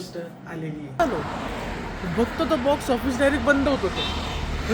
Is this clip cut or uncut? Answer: cut